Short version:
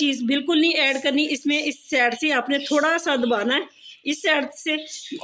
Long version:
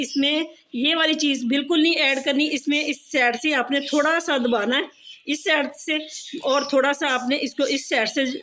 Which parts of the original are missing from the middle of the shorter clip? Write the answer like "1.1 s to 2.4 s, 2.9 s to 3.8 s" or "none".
none